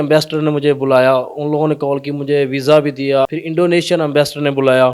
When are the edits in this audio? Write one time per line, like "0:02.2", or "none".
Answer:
0:03.3